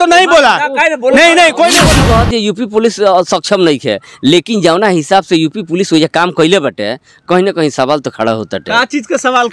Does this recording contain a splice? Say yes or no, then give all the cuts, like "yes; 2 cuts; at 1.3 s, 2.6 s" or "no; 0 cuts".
yes; 1 cut; at 1.9 s